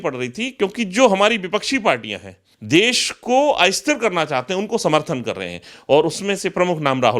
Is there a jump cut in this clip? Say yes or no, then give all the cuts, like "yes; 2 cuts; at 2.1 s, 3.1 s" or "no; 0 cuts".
yes; 1 cut; at 2.4 s